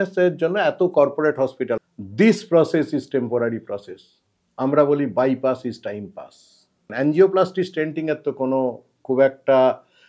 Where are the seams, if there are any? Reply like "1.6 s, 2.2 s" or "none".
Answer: 1.7 s, 6.9 s